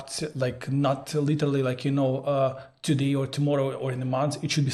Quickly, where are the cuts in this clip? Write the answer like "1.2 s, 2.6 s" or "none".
none